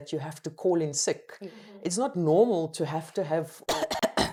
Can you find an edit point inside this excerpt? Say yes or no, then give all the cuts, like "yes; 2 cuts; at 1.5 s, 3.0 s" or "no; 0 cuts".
no; 0 cuts